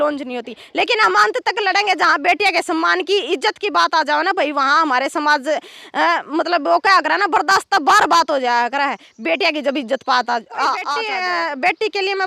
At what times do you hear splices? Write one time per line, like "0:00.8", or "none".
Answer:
0:10.9

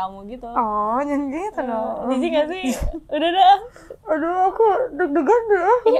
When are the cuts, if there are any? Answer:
none

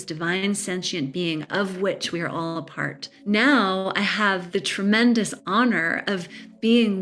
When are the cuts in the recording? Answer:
0:03.1
0:04.4

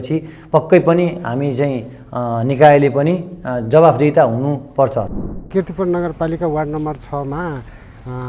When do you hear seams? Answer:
0:05.2

